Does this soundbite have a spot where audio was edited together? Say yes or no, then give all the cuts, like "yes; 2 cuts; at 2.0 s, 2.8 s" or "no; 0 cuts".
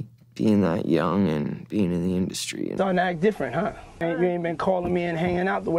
yes; 2 cuts; at 2.7 s, 4.0 s